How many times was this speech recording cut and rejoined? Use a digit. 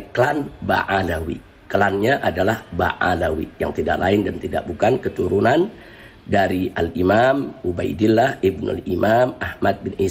0